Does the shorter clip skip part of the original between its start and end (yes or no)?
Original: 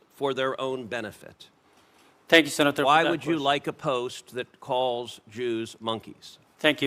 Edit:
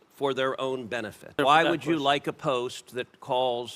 yes